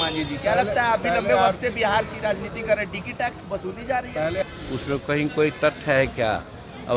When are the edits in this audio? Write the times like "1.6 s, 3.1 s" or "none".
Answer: 4.4 s

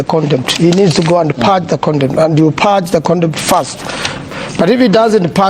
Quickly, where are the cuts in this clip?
4.2 s

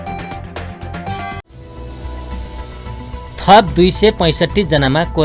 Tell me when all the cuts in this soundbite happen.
1.6 s

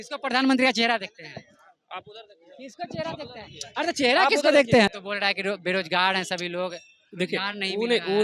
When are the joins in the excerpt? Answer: 4.9 s

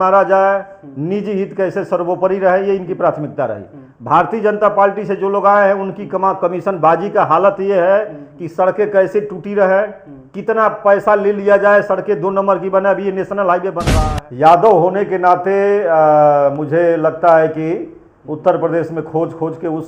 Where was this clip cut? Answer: 13.8 s

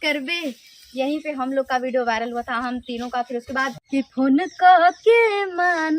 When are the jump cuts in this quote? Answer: 3.8 s

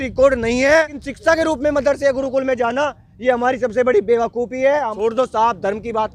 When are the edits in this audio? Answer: 1.0 s, 4.9 s

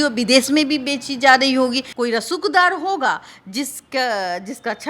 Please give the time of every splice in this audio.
1.9 s

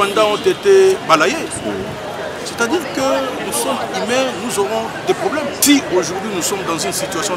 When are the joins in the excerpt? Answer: 5.6 s

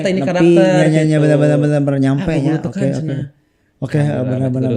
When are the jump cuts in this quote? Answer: none

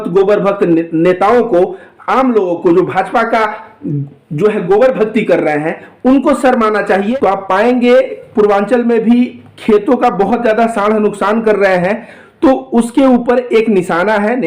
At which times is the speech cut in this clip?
7.1 s

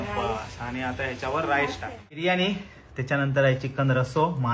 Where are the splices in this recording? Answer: 2.2 s

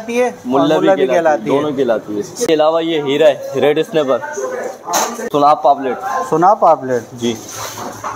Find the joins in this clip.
2.5 s, 5.2 s

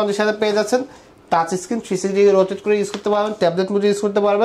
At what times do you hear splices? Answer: none

